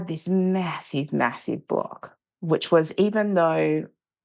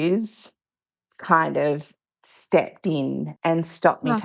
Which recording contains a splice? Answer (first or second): second